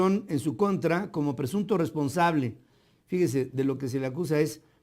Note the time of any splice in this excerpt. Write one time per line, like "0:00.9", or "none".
0:01.1